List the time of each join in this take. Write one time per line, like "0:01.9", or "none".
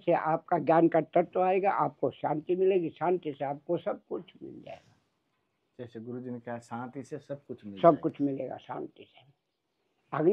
none